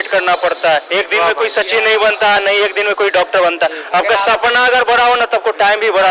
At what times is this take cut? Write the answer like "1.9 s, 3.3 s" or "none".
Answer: none